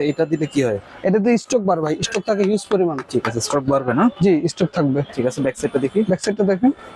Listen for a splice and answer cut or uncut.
uncut